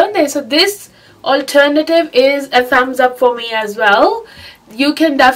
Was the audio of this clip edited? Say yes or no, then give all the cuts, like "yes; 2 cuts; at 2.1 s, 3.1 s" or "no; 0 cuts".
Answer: no; 0 cuts